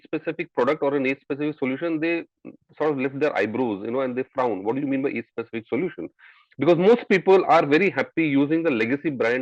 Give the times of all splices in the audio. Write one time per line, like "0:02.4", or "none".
none